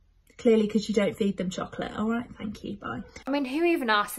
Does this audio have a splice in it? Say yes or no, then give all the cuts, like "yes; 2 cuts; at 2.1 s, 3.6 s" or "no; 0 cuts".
yes; 1 cut; at 3.2 s